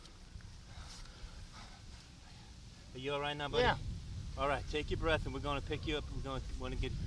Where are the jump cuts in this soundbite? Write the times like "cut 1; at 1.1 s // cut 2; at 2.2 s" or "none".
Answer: cut 1; at 0.9 s